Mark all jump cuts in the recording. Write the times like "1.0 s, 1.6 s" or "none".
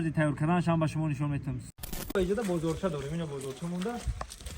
1.8 s